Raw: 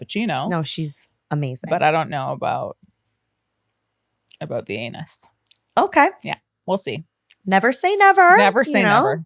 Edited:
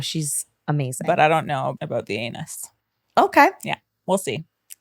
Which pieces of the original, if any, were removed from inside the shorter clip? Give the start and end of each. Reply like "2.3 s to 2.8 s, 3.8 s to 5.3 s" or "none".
2.4 s to 4.3 s